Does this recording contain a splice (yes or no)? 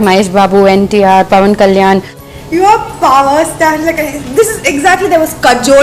yes